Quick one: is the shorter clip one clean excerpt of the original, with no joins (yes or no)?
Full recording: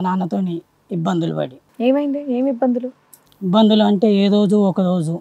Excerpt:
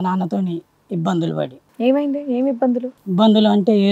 no